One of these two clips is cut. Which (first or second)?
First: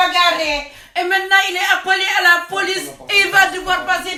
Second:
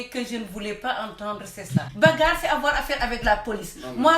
second